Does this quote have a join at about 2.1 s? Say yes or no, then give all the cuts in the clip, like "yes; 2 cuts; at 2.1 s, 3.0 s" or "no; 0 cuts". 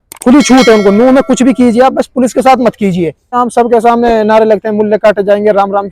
no; 1 cut; at 3.4 s